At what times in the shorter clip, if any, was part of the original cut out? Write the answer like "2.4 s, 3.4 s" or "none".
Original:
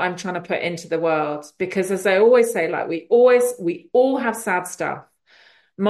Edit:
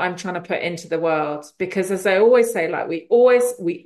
none